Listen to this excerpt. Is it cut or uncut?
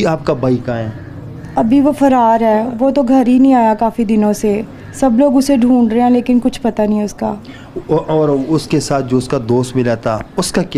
uncut